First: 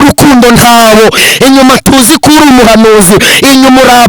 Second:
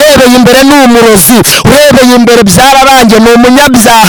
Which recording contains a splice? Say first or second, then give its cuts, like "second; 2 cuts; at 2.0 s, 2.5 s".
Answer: first; 1 cut; at 1.2 s